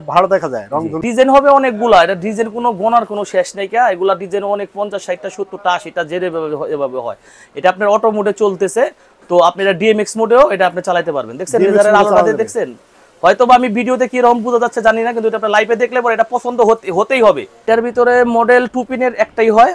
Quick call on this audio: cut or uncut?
cut